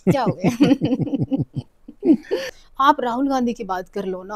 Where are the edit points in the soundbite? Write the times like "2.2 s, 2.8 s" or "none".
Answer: 2.6 s

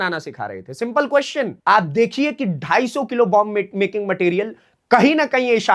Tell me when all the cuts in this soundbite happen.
1.5 s

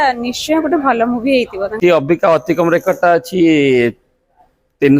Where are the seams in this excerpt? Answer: 1.8 s

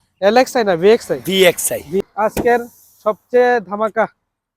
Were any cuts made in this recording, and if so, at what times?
2.0 s

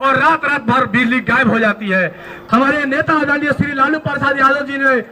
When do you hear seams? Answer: 2.3 s

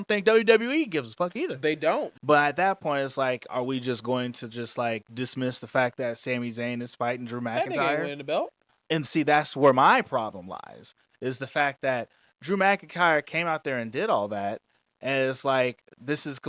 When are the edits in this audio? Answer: 2.1 s, 8.7 s

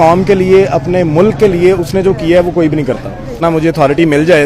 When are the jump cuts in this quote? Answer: 3.4 s

